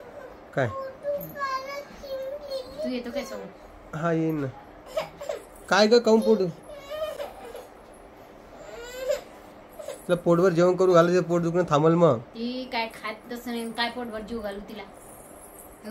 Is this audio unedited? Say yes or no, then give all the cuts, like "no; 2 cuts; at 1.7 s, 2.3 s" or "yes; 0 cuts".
yes; 0 cuts